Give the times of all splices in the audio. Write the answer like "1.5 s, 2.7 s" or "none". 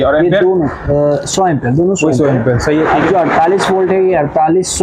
none